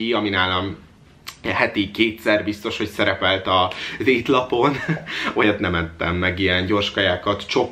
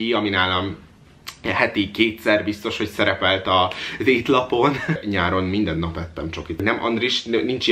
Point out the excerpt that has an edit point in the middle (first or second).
second